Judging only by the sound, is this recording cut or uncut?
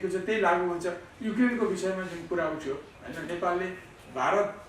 cut